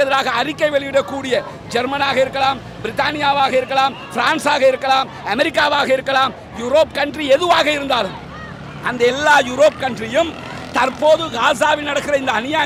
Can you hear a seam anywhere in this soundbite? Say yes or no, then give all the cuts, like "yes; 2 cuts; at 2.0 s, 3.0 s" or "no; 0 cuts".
no; 0 cuts